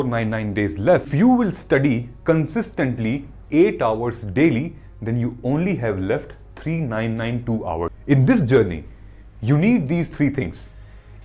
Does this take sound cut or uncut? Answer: cut